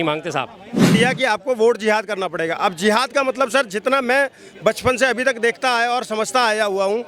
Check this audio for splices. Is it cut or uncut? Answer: cut